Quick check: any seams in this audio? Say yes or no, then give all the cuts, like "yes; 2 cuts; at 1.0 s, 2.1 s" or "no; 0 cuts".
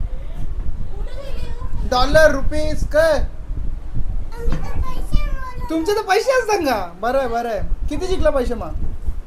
no; 0 cuts